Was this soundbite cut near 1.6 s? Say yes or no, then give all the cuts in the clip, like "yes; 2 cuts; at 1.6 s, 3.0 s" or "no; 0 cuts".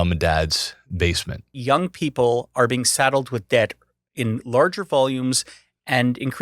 yes; 1 cut; at 1.6 s